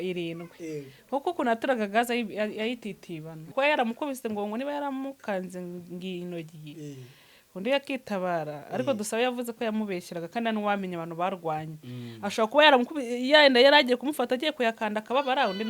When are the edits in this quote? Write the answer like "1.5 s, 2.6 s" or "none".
3.5 s